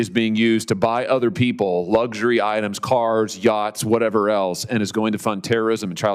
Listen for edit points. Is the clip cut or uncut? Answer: uncut